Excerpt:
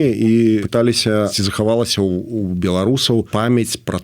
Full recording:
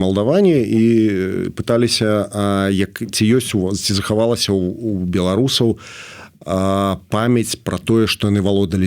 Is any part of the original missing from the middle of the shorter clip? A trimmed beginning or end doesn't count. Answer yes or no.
yes